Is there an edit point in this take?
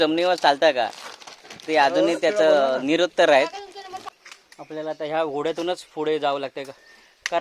yes; 1 cut; at 4.1 s

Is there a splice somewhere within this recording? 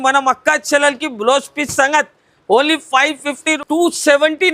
yes; 1 cut; at 3.5 s

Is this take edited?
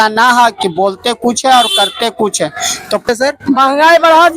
yes; 1 cut; at 3.1 s

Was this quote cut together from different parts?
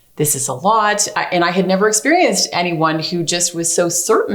no; 0 cuts

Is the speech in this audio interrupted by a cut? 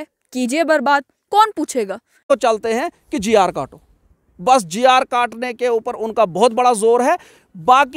yes; 1 cut; at 2.3 s

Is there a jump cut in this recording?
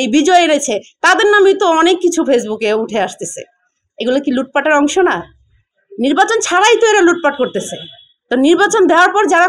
no; 0 cuts

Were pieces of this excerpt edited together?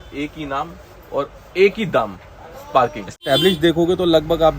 yes; 1 cut; at 3.2 s

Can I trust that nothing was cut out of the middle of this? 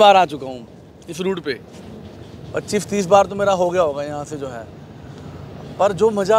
yes; 0 cuts

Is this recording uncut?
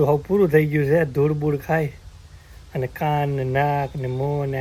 yes; 0 cuts

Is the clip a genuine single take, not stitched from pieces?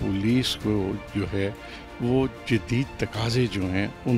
yes; 0 cuts

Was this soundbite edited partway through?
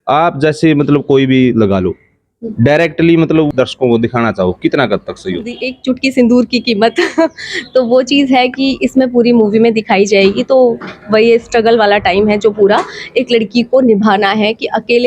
yes; 2 cuts; at 3.5 s, 5.7 s

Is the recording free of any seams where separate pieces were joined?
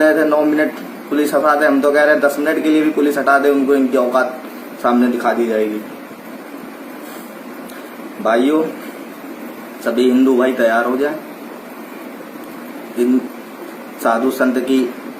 yes; 0 cuts

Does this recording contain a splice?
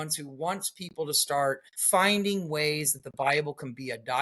yes; 1 cut; at 1.7 s

